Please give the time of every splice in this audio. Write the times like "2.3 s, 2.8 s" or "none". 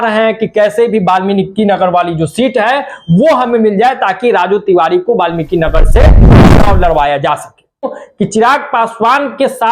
7.9 s